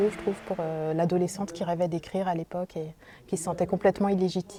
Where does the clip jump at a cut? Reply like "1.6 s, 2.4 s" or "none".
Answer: none